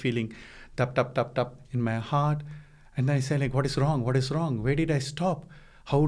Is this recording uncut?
yes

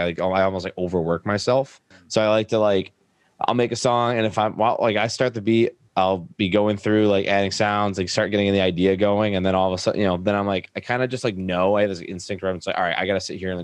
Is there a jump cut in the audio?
no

